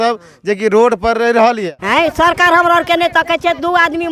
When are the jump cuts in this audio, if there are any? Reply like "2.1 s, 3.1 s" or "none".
1.7 s

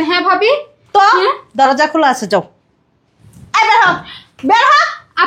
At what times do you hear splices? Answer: none

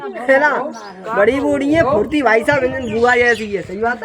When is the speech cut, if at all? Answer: none

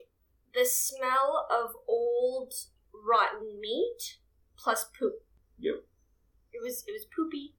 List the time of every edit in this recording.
4.5 s

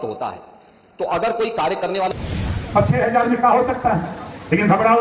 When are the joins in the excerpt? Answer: 2.1 s

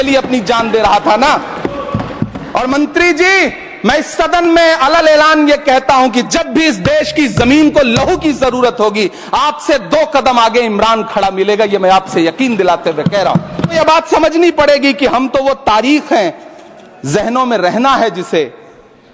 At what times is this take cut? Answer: 13.7 s

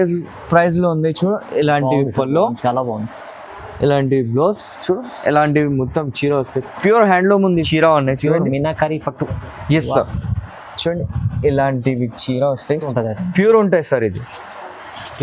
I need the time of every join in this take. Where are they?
7.6 s, 12.8 s

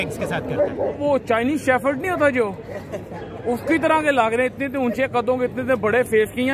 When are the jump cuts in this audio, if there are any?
1.0 s

